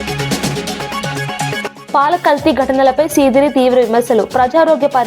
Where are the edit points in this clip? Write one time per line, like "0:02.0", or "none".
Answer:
0:01.1
0:01.8